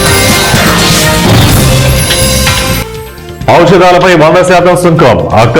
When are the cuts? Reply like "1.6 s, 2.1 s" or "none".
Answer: none